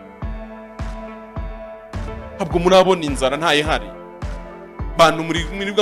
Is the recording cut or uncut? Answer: cut